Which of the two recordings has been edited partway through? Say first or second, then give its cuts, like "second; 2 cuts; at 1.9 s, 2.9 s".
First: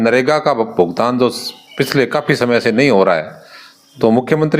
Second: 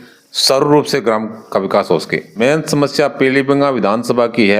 second; 1 cut; at 2.4 s